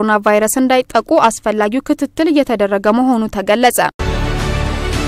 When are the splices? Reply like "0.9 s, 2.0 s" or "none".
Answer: 4.1 s